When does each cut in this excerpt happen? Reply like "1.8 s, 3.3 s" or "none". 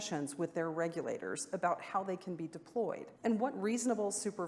3.1 s